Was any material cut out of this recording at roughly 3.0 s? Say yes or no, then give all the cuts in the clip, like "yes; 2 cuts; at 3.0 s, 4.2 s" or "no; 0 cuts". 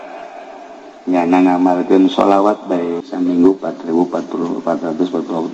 yes; 1 cut; at 3.0 s